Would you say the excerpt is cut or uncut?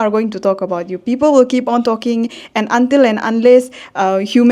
uncut